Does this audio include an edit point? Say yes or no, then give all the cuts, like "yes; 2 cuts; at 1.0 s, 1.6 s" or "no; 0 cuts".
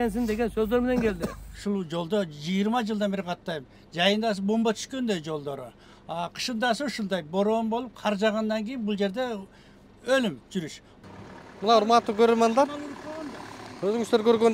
yes; 2 cuts; at 1.6 s, 10.9 s